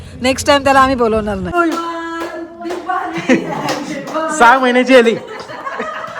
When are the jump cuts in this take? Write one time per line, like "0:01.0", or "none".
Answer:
0:01.5